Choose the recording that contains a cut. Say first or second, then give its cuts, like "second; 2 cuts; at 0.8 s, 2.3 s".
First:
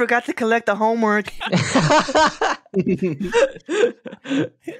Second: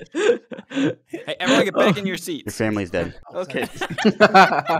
first; 1 cut; at 1.3 s